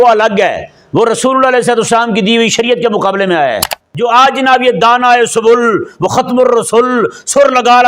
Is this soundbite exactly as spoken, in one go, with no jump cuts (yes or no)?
no